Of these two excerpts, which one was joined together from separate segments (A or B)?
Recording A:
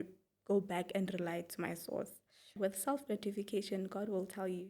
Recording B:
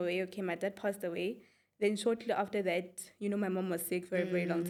A